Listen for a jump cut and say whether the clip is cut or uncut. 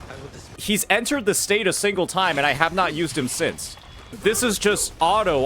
cut